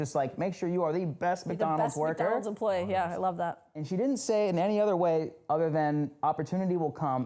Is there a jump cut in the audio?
no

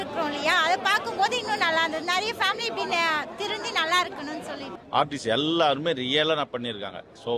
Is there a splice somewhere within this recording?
yes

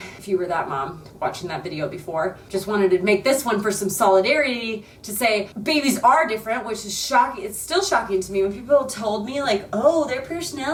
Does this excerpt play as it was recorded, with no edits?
yes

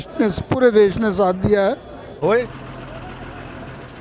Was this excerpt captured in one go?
no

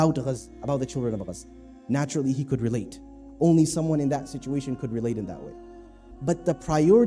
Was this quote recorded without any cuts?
yes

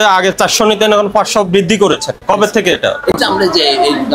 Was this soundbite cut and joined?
no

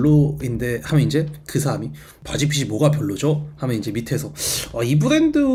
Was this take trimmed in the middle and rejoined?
no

